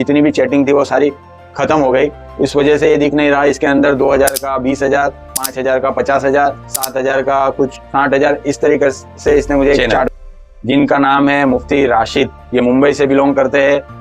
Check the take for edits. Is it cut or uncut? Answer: cut